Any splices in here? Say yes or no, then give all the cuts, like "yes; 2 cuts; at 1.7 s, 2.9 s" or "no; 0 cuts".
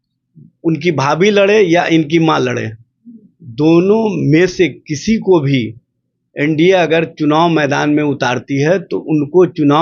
no; 0 cuts